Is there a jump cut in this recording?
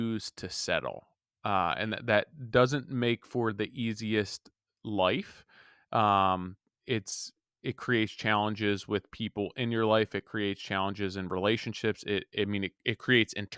no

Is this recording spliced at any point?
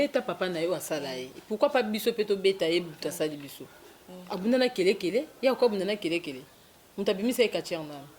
no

